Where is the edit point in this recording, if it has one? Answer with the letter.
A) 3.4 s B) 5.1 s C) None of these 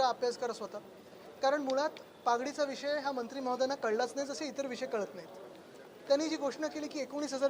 A